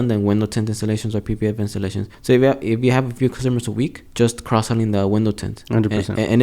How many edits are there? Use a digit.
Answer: 2